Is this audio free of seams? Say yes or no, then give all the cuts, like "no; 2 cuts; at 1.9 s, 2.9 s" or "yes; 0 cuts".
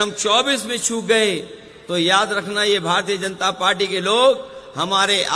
yes; 0 cuts